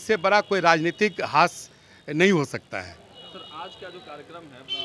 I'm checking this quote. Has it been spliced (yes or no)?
no